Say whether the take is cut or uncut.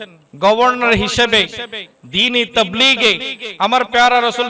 uncut